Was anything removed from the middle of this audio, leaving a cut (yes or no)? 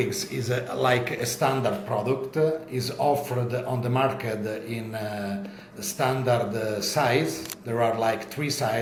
no